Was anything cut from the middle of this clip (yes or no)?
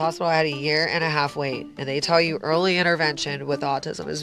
no